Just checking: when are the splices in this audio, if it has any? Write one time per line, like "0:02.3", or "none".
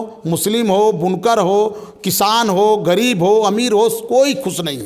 none

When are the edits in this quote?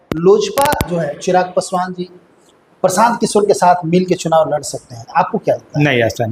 none

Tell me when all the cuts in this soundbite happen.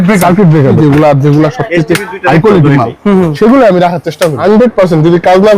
0:00.8
0:04.4

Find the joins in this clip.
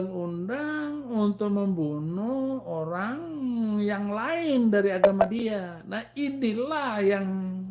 none

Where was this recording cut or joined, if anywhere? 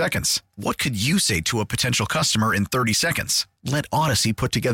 none

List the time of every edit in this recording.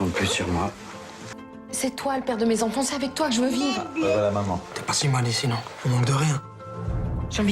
0:01.2

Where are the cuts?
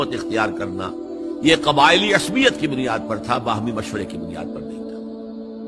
0:04.2

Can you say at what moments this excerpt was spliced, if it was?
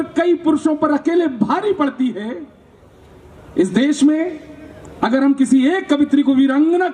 none

